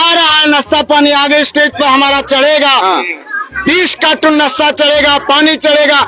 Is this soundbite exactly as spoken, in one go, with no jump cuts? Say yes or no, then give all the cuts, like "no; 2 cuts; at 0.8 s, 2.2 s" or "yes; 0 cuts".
no; 1 cut; at 5.2 s